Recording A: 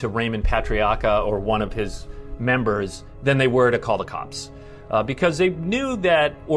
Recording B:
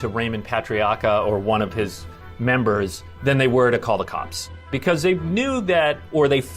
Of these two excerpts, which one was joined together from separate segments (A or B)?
B